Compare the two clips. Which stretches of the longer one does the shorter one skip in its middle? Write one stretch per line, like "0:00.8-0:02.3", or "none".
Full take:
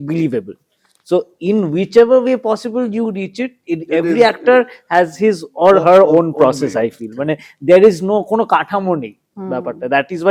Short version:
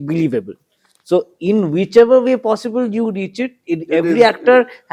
none